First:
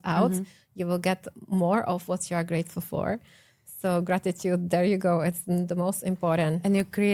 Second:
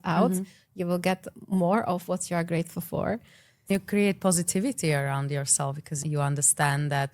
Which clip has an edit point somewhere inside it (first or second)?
second